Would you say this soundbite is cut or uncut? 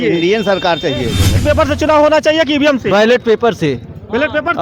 cut